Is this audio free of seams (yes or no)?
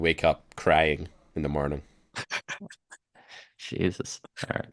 yes